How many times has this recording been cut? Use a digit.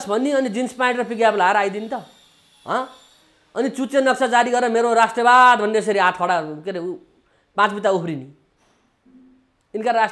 0